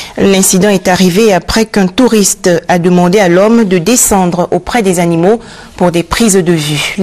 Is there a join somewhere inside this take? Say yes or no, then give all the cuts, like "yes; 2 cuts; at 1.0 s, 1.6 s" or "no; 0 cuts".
yes; 1 cut; at 1.7 s